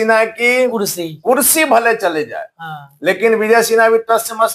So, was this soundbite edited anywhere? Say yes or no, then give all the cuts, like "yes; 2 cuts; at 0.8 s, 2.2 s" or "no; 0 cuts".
no; 0 cuts